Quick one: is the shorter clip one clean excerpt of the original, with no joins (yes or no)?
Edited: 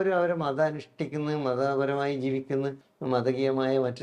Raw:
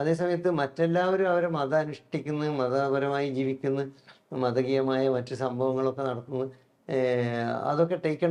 no